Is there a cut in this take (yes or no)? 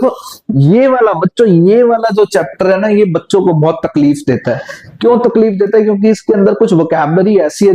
no